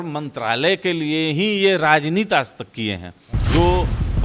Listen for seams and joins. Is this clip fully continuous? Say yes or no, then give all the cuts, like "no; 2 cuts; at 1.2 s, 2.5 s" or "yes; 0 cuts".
no; 1 cut; at 3.3 s